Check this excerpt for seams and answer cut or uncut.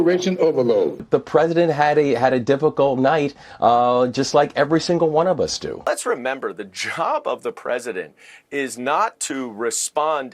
cut